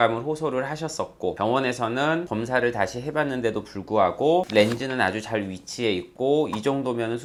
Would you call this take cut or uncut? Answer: uncut